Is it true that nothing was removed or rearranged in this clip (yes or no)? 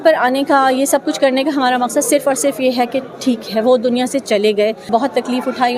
no